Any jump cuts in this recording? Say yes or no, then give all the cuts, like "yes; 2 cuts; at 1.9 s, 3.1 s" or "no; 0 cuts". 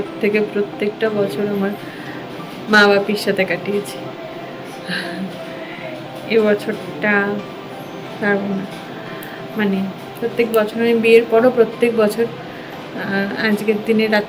no; 0 cuts